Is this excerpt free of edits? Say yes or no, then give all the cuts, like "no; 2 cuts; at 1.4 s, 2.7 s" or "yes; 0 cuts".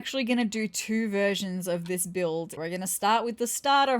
no; 1 cut; at 2.6 s